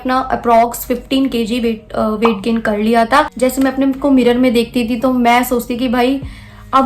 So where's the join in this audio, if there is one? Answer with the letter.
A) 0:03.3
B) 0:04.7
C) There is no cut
A